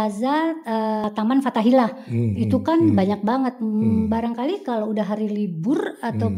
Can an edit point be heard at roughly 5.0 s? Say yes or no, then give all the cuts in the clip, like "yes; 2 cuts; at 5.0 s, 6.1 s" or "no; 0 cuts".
no; 1 cut; at 1.0 s